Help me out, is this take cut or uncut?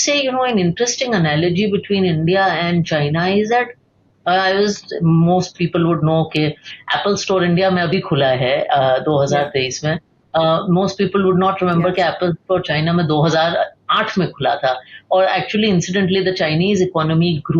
uncut